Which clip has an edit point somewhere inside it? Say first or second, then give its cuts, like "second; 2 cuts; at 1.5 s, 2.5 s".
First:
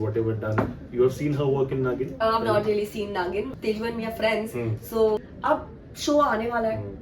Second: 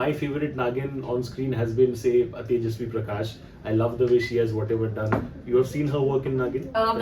first; 2 cuts; at 3.5 s, 5.2 s